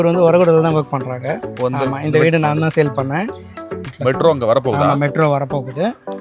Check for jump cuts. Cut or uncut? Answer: cut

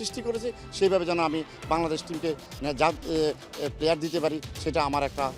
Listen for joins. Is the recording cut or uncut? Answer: uncut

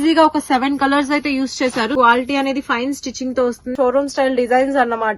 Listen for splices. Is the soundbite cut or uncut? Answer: cut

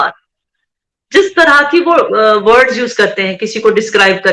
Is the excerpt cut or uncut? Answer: uncut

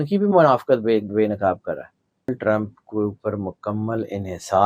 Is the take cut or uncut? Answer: cut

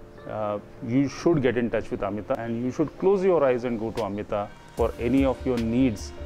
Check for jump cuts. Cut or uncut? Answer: uncut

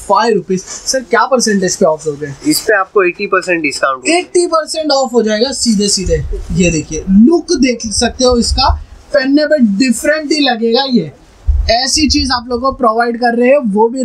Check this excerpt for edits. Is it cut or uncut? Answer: uncut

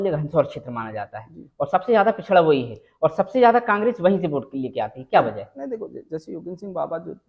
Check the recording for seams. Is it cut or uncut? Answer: uncut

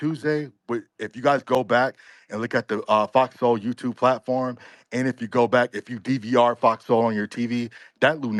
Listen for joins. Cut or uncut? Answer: uncut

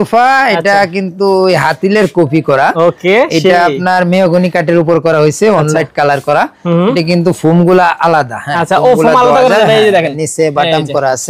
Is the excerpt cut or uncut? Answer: uncut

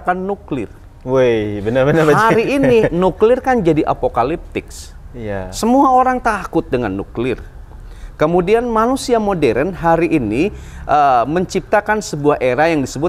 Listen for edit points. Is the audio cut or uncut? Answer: uncut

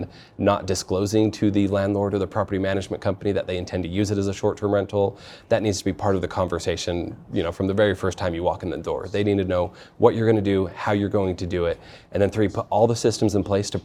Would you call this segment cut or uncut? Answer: uncut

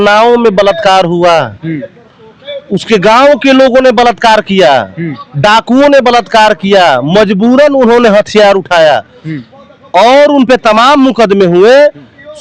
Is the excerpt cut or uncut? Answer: uncut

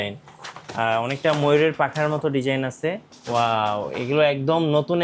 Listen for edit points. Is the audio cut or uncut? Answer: cut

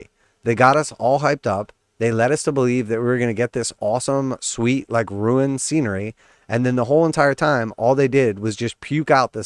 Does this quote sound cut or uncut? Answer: uncut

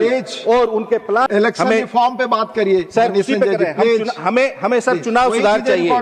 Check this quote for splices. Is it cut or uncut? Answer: cut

